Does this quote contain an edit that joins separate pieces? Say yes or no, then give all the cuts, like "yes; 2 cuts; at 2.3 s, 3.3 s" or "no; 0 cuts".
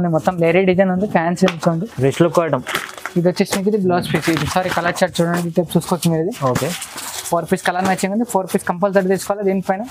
no; 0 cuts